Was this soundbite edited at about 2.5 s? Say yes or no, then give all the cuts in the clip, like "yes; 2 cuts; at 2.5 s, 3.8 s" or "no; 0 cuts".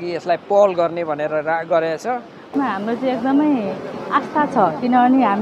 yes; 1 cut; at 2.5 s